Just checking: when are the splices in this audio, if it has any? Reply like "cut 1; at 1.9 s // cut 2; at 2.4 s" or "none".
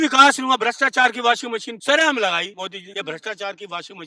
cut 1; at 1.7 s // cut 2; at 2.6 s